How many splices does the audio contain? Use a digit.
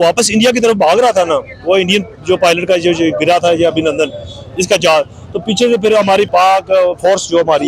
1